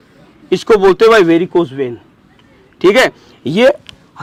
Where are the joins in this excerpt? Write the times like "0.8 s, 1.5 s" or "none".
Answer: none